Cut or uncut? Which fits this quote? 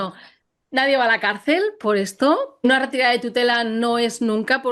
cut